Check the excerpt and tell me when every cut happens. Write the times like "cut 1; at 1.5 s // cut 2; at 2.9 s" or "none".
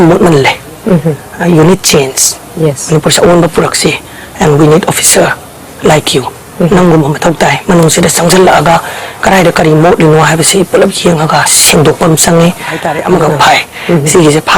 cut 1; at 13.2 s